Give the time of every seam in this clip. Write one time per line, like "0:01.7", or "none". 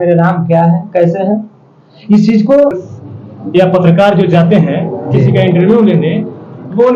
0:02.9

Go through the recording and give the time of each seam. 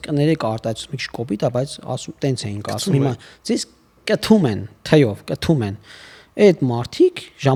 none

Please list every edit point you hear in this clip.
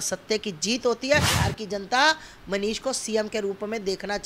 0:01.3

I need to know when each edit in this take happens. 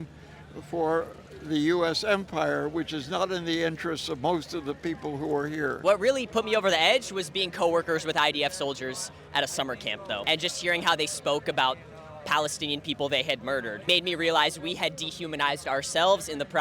0:05.8
0:10.2
0:13.7

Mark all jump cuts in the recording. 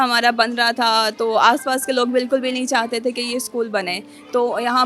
none

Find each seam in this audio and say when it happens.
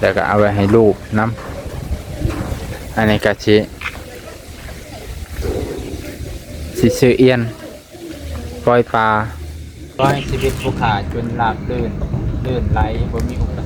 0:09.9

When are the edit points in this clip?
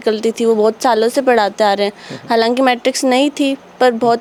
none

